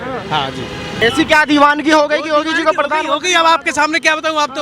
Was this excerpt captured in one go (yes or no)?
no